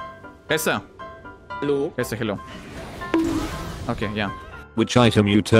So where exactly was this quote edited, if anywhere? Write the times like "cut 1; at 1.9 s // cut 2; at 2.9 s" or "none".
cut 1; at 4.7 s